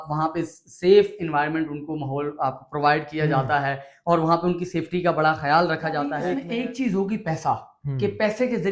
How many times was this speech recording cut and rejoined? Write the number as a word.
one